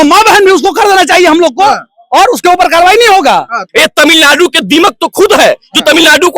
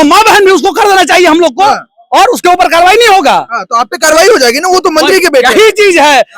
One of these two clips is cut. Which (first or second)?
first